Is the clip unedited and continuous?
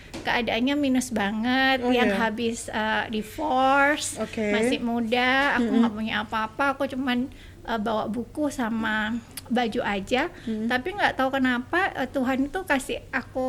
yes; 0 cuts

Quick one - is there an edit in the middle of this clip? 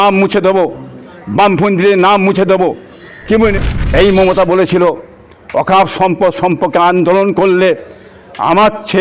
yes; 1 cut; at 3.5 s

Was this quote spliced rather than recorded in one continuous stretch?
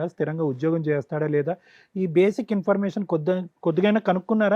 no; 0 cuts

